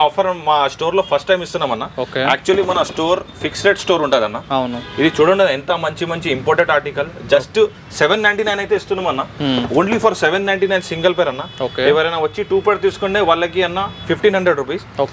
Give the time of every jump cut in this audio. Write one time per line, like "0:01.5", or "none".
none